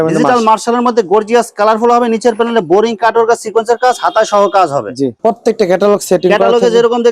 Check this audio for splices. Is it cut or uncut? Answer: cut